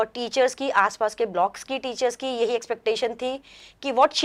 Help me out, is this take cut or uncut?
uncut